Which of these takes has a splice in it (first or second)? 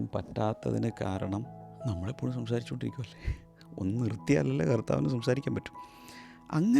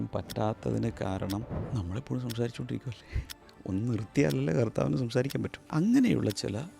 second